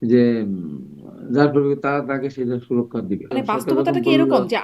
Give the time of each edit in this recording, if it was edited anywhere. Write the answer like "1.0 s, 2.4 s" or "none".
3.3 s